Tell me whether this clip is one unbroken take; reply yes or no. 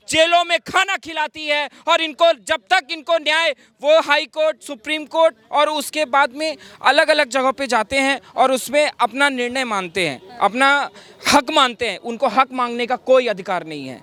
yes